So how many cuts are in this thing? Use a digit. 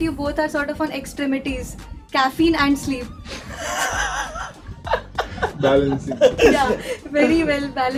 0